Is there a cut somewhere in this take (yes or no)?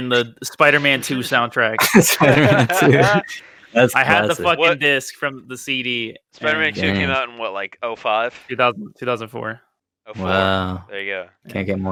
no